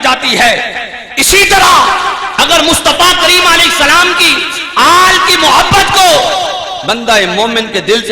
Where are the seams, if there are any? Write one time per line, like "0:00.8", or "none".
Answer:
none